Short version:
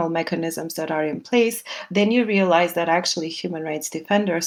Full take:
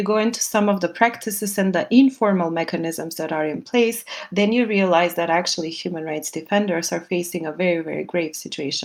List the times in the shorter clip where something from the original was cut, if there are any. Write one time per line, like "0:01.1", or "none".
none